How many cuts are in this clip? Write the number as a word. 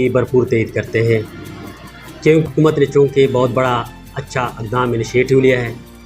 one